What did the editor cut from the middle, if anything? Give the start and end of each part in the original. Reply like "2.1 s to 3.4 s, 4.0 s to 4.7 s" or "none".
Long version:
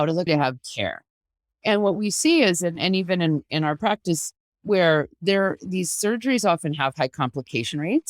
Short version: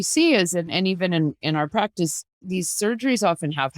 4.5 s to 5.6 s